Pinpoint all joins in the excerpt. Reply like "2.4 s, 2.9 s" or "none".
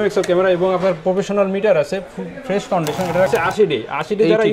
3.3 s